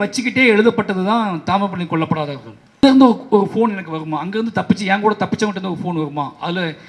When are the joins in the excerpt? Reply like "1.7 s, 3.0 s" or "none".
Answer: 2.8 s